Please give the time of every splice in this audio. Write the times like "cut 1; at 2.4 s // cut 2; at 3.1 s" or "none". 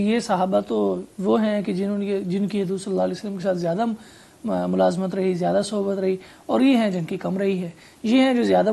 none